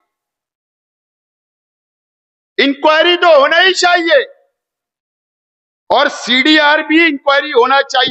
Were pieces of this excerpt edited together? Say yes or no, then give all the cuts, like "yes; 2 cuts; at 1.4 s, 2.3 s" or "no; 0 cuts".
no; 0 cuts